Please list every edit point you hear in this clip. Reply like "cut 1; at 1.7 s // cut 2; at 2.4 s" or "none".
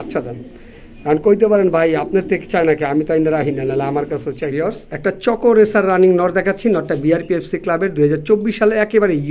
cut 1; at 4.5 s